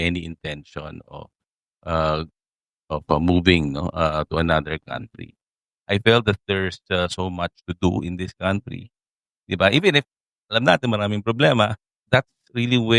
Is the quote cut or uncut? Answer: cut